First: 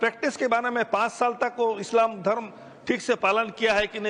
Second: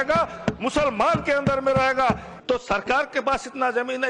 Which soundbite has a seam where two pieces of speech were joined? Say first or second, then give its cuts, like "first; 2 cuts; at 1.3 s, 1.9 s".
second; 1 cut; at 2.3 s